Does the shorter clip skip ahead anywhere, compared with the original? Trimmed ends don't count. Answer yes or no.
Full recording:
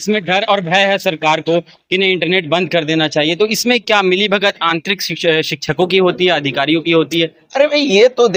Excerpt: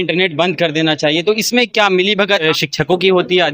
yes